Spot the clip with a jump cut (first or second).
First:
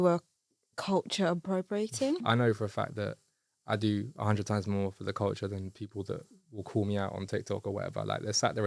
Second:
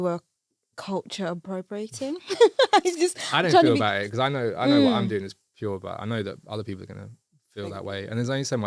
first